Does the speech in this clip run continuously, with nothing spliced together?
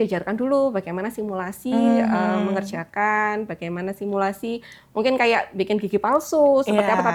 yes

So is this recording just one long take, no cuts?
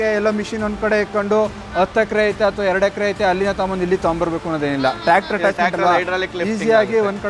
yes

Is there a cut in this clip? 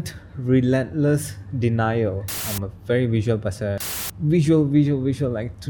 yes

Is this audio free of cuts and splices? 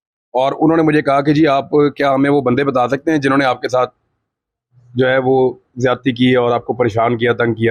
yes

